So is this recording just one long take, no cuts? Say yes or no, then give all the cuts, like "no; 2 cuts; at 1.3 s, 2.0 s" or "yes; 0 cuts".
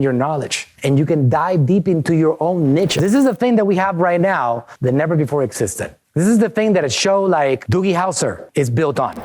no; 1 cut; at 3.0 s